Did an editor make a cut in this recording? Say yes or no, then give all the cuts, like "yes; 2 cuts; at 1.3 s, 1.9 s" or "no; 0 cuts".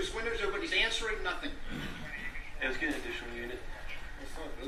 no; 0 cuts